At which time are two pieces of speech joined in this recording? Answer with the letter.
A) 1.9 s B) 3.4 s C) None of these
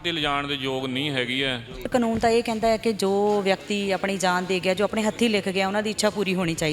A